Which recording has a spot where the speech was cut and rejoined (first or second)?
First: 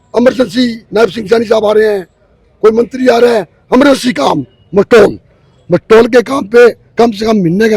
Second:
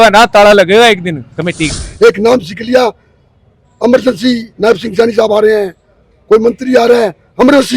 second